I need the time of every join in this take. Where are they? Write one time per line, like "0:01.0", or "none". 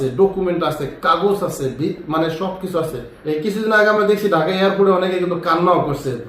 0:03.1